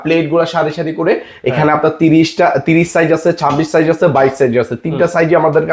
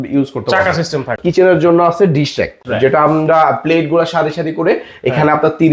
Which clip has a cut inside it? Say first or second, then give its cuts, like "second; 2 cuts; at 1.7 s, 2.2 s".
second; 2 cuts; at 1.2 s, 2.6 s